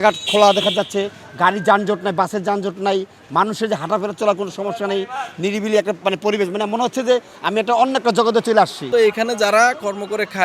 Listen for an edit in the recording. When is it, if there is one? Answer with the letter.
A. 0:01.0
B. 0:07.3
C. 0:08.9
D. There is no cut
C